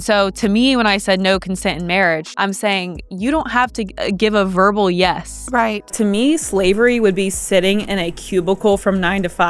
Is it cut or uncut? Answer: cut